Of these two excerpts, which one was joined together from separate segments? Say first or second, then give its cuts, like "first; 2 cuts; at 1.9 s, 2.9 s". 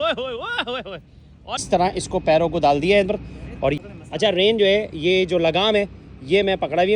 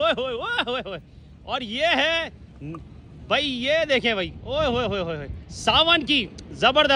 first; 2 cuts; at 1.6 s, 3.8 s